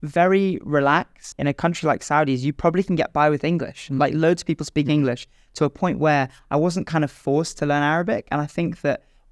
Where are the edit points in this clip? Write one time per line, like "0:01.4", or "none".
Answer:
0:01.3